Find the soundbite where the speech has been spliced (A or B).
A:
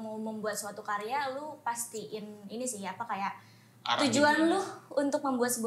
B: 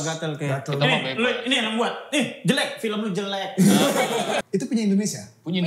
B